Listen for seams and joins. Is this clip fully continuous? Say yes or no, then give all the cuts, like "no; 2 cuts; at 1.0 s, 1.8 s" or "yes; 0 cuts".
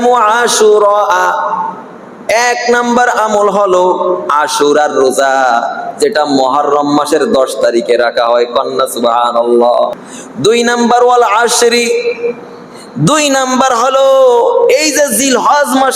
no; 1 cut; at 9.9 s